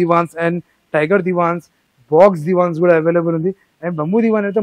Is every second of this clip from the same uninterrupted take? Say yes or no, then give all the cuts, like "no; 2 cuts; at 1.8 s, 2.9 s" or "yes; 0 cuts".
yes; 0 cuts